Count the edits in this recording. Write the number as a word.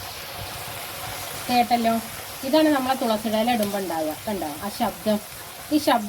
zero